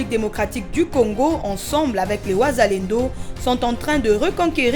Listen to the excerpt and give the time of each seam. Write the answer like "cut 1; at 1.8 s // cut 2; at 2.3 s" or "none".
none